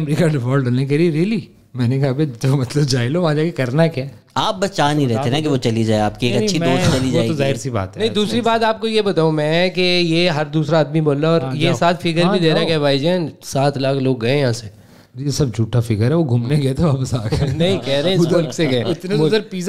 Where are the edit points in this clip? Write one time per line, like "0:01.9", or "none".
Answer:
none

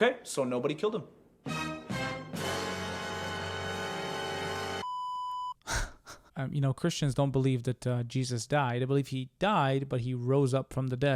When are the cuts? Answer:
none

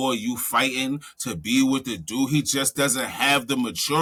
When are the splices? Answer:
none

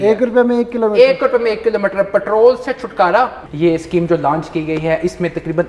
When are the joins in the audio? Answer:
0:03.4

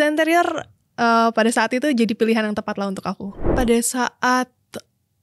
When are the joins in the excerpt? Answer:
0:03.5

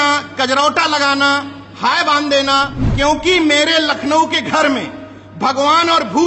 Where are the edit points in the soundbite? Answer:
0:03.3

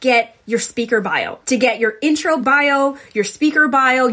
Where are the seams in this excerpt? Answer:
0:01.3
0:02.4

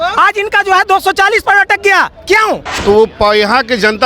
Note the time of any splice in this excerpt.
0:02.7

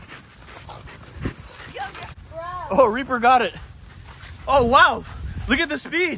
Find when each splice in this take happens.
0:02.2

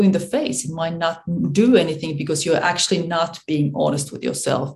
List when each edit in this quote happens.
none

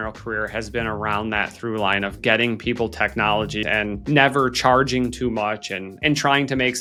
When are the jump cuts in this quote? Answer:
none

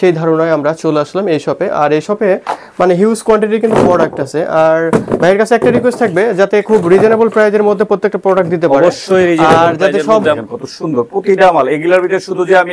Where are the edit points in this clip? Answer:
0:10.4

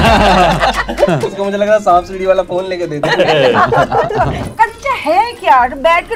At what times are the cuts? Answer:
0:01.3
0:04.4

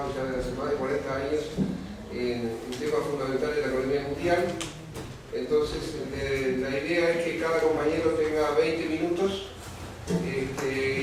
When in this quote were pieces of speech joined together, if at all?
none

